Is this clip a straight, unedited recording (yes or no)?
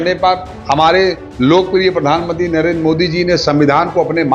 yes